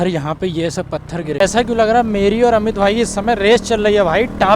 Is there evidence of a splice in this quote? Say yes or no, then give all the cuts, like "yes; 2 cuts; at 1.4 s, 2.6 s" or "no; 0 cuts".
yes; 1 cut; at 1.4 s